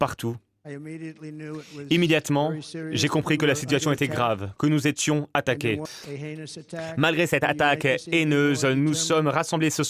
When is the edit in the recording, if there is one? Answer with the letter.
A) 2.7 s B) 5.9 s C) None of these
B